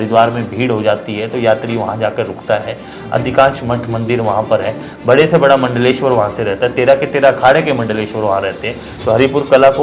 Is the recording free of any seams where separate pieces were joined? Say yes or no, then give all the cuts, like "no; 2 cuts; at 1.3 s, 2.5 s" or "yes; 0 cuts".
yes; 0 cuts